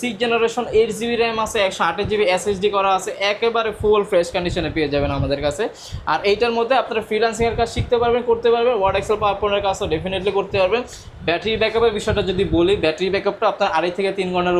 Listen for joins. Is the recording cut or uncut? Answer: uncut